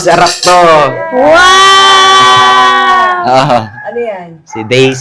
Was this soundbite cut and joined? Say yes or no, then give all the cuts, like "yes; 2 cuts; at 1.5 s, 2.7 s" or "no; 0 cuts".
no; 0 cuts